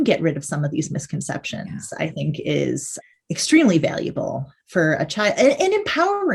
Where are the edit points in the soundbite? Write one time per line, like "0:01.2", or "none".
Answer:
none